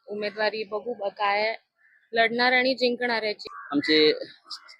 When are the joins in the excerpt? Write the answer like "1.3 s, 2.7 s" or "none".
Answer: 3.5 s